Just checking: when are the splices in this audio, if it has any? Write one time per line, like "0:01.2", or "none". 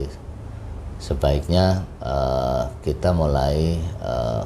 none